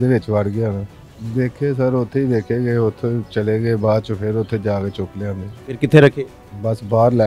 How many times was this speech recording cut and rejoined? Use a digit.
1